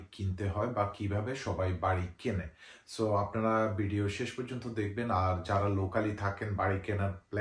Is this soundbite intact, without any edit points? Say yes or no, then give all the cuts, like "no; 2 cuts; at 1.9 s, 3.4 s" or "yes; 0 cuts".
yes; 0 cuts